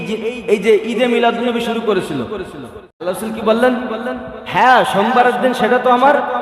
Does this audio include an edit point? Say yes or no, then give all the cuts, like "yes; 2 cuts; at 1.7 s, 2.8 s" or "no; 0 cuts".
yes; 1 cut; at 2.8 s